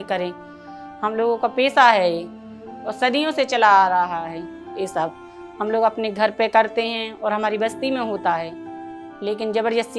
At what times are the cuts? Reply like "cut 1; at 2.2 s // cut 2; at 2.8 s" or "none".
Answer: none